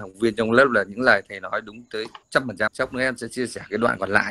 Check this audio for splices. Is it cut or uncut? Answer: cut